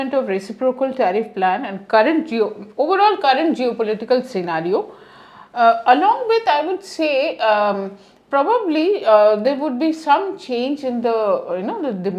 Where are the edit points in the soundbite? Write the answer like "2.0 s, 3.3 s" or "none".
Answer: none